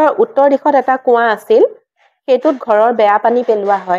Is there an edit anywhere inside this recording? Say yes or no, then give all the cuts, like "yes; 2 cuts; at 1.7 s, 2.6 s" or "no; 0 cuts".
no; 0 cuts